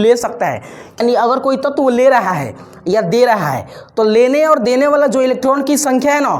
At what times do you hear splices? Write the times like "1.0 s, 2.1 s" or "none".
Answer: 1.0 s

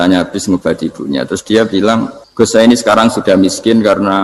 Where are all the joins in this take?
2.2 s

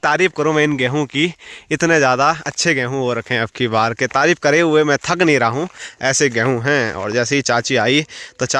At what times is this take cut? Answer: none

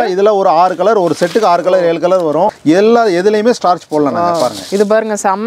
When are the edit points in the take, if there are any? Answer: 2.5 s

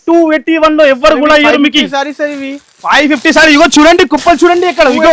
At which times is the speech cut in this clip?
none

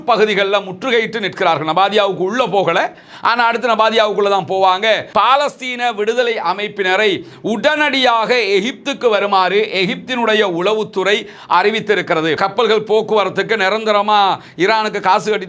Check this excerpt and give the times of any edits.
5.1 s, 12.4 s

